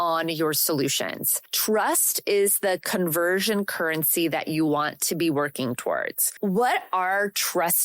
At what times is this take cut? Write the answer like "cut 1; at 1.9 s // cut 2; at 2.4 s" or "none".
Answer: cut 1; at 6.3 s